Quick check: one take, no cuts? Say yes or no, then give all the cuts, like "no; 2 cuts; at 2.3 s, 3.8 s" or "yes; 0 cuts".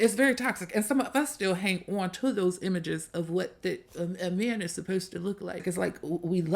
no; 1 cut; at 5.6 s